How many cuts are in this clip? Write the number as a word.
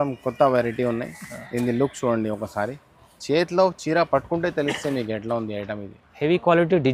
zero